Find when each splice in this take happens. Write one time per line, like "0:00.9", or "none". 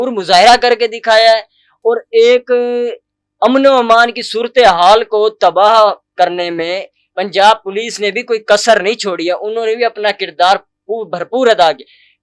none

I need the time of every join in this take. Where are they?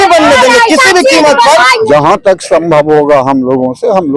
0:01.8

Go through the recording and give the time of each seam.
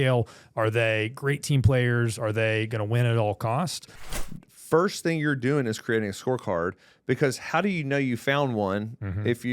0:04.0

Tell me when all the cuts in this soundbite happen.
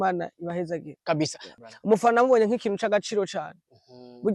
0:01.4

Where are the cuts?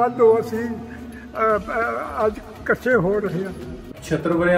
none

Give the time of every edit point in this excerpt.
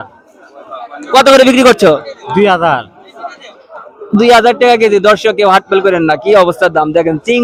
none

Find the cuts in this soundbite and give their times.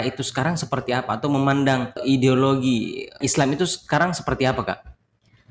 0:02.0
0:03.2

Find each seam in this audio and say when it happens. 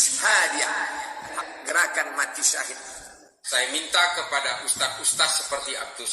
0:01.3
0:03.3

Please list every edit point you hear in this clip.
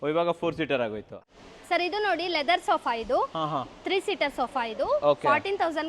0:01.2

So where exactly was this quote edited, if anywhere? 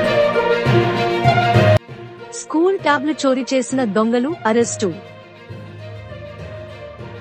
0:01.8

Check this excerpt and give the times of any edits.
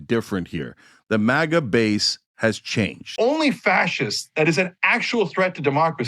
0:03.1

